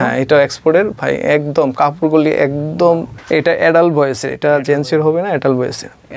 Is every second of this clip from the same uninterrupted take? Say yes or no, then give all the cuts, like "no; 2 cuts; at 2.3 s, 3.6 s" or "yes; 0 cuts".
no; 1 cut; at 3.1 s